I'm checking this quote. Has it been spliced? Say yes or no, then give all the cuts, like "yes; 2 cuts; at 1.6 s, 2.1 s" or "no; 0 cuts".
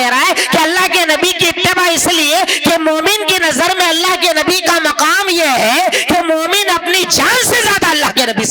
no; 0 cuts